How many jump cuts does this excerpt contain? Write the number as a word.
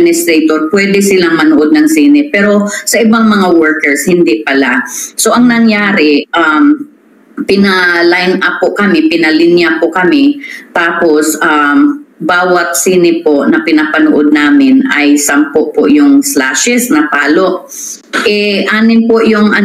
zero